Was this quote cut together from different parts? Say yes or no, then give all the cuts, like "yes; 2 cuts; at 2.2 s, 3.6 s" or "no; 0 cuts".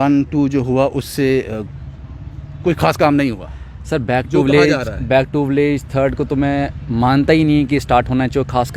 no; 0 cuts